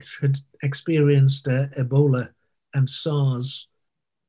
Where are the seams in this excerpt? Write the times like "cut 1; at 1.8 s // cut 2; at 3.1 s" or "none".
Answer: none